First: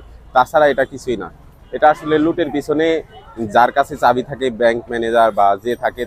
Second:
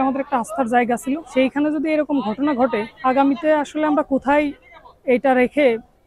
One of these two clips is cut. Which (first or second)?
second